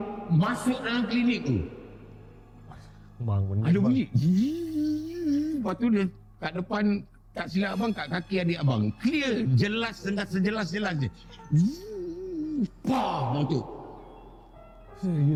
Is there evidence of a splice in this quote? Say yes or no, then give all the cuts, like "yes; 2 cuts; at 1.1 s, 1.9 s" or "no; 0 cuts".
no; 0 cuts